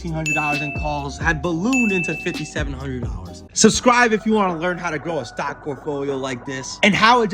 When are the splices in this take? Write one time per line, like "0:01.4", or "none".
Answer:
0:03.4